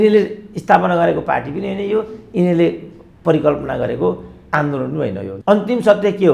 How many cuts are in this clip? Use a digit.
1